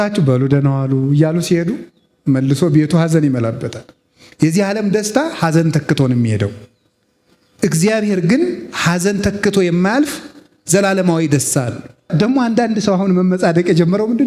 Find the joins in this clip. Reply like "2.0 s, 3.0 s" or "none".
12.1 s

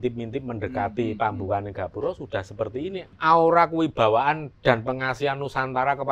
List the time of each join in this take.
3.1 s, 4.5 s

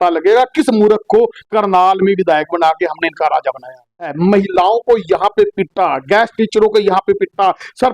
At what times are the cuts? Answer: 4.1 s

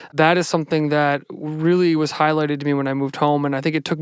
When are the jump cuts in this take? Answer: none

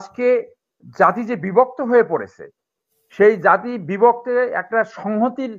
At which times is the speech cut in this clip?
none

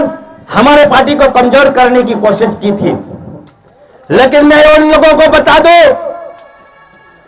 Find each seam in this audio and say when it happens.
none

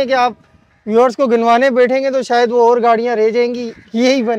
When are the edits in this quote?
none

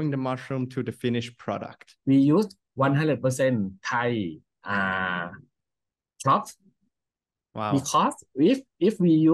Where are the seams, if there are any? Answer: 1.9 s

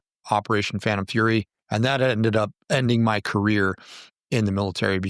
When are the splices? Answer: 1.6 s, 2.6 s

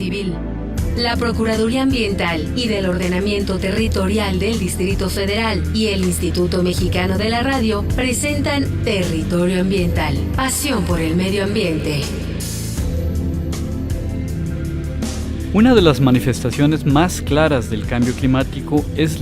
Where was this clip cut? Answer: 10.3 s

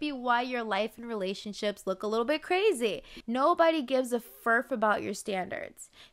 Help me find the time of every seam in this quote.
3.1 s

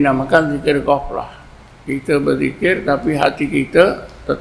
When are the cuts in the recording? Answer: none

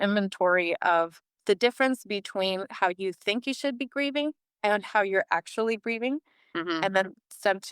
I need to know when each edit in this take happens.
1.3 s

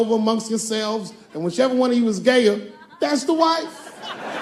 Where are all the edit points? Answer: none

